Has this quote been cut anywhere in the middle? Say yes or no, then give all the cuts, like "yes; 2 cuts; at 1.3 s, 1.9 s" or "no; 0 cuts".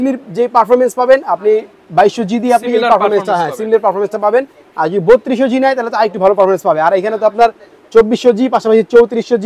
no; 0 cuts